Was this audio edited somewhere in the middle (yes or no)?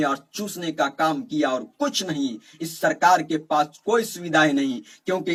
no